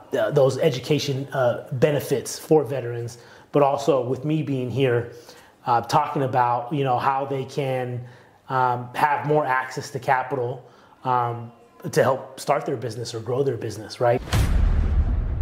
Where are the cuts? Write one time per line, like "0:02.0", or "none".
0:14.3